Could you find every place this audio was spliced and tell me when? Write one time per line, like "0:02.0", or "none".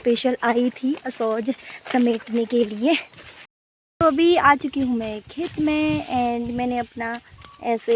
0:03.4